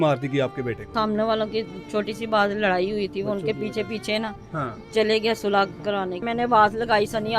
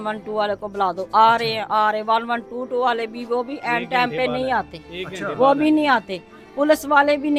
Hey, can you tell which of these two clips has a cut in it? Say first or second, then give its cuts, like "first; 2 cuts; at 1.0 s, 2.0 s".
first; 2 cuts; at 0.9 s, 6.2 s